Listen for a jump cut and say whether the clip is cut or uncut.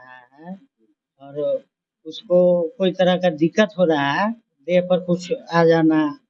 cut